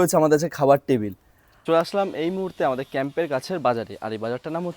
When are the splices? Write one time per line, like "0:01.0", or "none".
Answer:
0:01.1

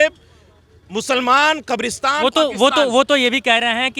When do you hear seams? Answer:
none

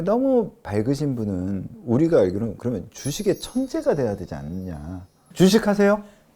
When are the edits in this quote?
0:01.7
0:05.2

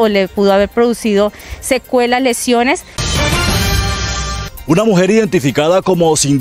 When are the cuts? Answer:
0:03.0
0:04.5

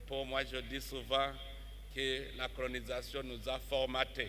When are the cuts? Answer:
none

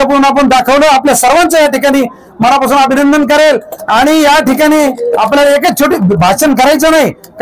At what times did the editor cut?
none

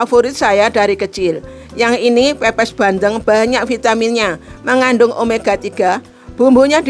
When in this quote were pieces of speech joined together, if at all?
none

